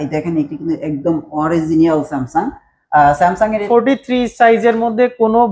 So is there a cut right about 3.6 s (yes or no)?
yes